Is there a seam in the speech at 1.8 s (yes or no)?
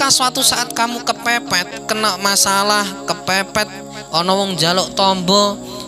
yes